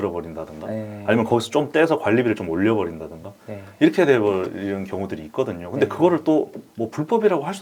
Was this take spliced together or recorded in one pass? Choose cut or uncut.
uncut